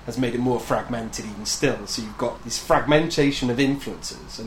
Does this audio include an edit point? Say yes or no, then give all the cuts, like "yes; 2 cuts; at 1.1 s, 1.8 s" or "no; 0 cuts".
no; 0 cuts